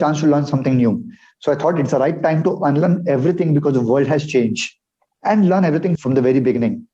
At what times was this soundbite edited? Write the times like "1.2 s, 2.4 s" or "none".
6.0 s